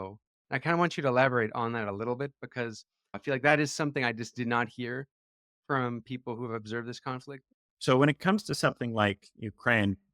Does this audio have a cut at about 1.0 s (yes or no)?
no